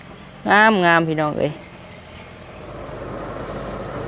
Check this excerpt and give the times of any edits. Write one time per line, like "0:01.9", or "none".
0:02.6